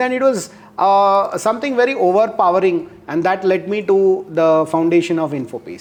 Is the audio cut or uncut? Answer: uncut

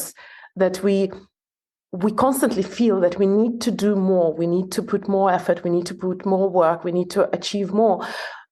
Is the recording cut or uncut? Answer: uncut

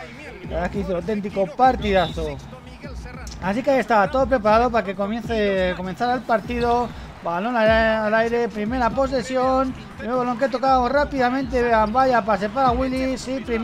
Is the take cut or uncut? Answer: cut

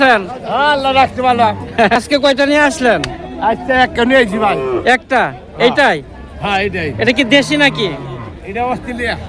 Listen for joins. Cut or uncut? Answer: cut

